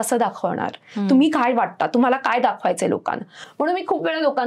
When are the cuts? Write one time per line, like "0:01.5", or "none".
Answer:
none